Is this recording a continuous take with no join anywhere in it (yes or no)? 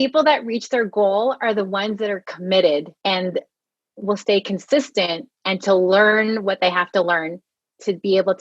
no